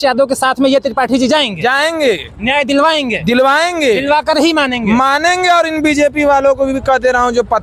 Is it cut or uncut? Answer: uncut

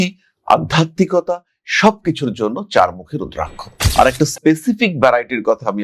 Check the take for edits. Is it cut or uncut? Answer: cut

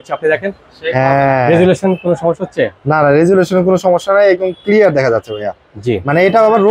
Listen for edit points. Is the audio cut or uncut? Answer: uncut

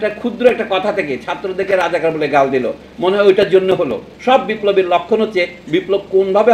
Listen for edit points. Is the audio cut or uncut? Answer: cut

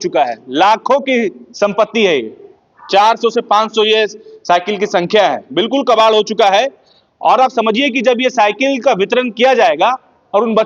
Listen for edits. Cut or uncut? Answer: uncut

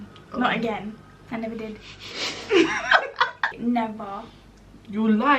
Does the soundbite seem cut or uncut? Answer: cut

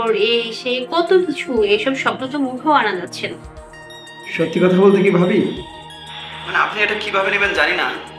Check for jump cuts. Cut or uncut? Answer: uncut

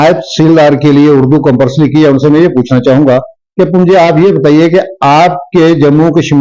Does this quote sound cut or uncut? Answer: uncut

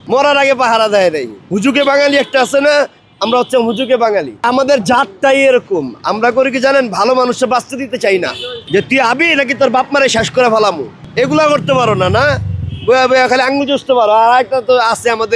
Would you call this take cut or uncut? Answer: cut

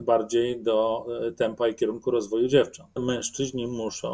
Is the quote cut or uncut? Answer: cut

